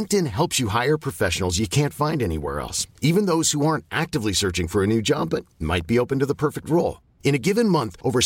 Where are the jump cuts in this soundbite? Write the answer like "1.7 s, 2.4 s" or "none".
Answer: none

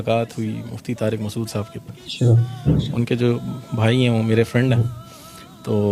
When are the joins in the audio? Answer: none

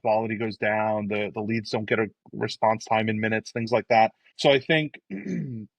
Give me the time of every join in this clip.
2.2 s, 4.3 s

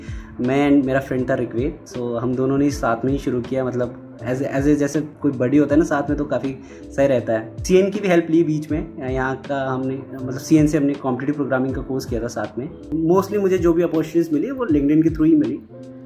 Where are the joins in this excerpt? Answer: 7.5 s, 12.9 s

